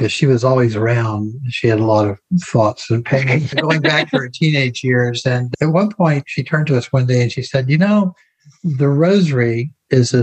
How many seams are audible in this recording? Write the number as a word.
two